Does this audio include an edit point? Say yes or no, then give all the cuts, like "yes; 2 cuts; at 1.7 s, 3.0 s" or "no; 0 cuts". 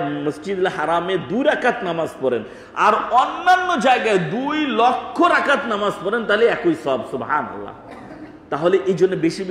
no; 0 cuts